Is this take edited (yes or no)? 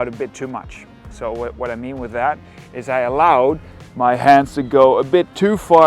no